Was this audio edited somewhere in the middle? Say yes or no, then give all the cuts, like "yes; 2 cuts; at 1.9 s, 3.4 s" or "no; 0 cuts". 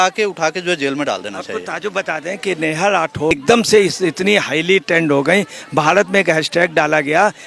yes; 1 cut; at 3.3 s